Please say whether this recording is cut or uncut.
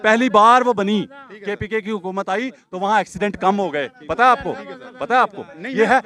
uncut